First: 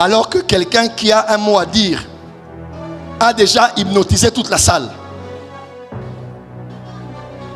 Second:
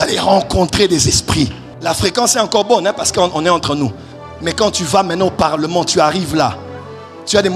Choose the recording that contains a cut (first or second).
second